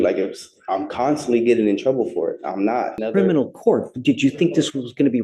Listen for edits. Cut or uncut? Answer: cut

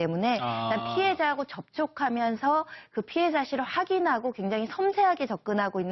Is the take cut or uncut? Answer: uncut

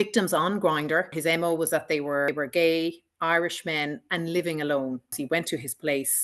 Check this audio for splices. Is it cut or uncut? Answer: cut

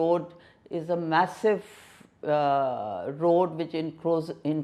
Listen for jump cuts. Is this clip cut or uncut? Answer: uncut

